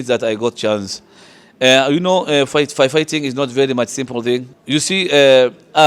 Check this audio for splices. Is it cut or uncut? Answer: cut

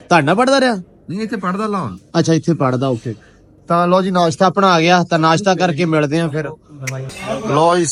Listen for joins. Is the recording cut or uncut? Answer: uncut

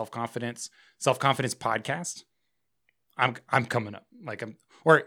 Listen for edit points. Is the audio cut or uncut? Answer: uncut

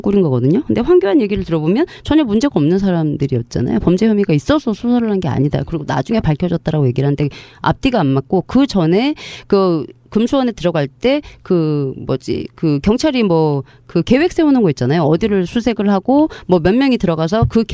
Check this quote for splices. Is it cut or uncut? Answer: cut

